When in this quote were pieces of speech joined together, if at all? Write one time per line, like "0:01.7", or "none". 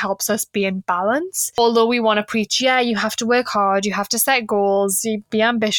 0:01.6